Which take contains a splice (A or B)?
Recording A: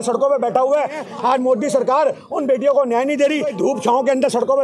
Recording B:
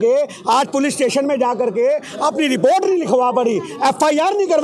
A